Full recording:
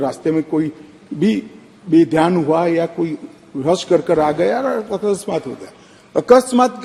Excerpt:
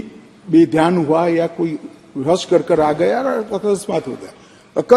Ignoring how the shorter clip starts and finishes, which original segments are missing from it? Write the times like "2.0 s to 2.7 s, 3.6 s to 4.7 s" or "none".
none